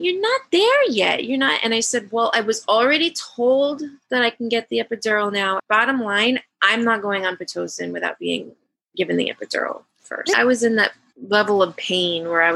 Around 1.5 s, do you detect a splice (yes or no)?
no